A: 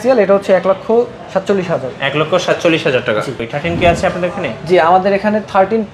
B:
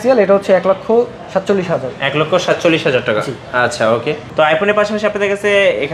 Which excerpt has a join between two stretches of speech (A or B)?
A